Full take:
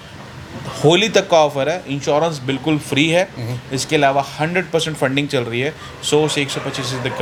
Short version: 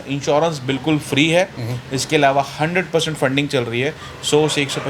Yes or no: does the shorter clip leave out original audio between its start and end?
no